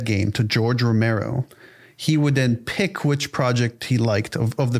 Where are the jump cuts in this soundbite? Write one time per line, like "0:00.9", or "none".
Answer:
none